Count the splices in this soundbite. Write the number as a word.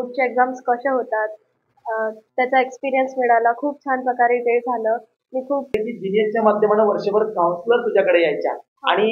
one